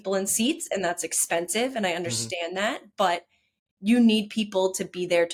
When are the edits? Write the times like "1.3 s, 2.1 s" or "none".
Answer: none